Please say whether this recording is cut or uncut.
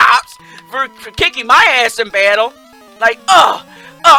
uncut